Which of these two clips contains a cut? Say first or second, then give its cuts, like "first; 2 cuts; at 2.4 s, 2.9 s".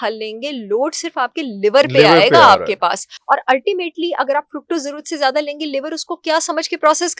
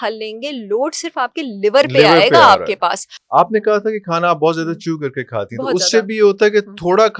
second; 1 cut; at 3.1 s